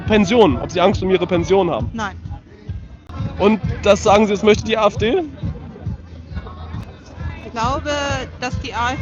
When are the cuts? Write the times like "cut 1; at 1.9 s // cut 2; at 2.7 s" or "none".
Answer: cut 1; at 3.1 s